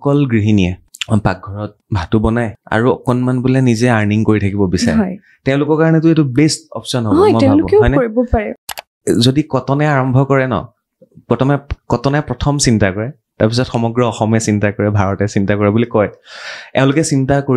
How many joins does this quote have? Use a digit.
4